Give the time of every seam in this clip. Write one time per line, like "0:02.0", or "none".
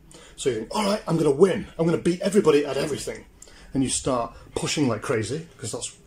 none